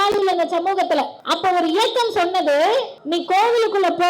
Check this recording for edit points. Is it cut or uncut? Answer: cut